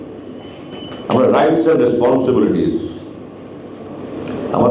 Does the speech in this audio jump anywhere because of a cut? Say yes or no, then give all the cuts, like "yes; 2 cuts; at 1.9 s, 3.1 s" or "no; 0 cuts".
no; 0 cuts